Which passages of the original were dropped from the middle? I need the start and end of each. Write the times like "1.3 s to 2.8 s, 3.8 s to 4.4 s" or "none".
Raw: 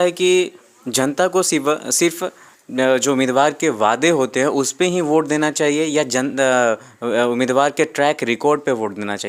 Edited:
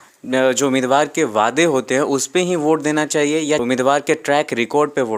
6.1 s to 7.3 s